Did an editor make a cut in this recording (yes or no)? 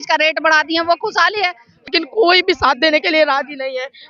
yes